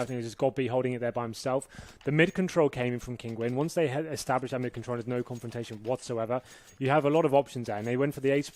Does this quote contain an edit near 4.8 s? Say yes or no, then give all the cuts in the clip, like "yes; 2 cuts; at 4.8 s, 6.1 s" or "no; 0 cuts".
yes; 1 cut; at 4.8 s